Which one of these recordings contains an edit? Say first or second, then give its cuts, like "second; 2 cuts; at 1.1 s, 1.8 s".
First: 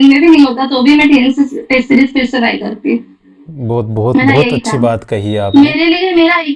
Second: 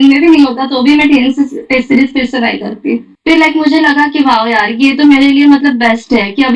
second; 1 cut; at 3.1 s